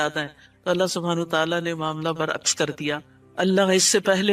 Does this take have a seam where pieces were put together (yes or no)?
no